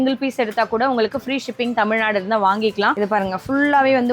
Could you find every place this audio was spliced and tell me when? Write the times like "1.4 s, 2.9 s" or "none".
2.9 s